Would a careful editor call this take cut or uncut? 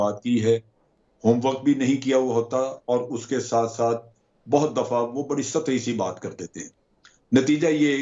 uncut